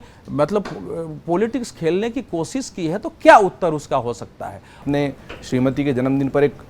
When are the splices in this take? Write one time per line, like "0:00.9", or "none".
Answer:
0:04.8